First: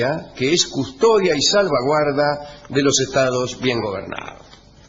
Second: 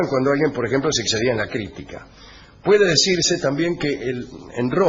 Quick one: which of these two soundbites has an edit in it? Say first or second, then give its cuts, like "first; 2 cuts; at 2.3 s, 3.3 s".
first; 1 cut; at 0.9 s